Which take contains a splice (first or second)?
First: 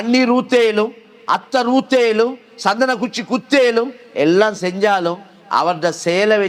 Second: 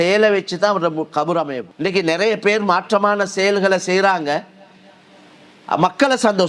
second